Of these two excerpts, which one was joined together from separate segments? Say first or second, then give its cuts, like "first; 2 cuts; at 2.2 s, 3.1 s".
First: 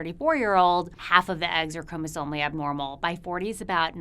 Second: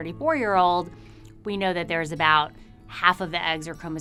first; 1 cut; at 1.0 s